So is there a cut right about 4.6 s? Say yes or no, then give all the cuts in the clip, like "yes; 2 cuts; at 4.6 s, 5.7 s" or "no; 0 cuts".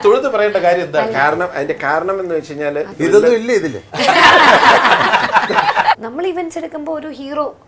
no; 2 cuts; at 2.9 s, 6.0 s